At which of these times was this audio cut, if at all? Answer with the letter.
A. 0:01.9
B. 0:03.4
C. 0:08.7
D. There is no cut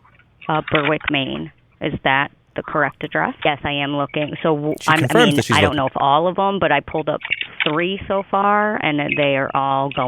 B